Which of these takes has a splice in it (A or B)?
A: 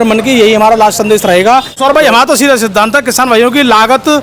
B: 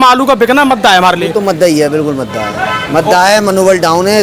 A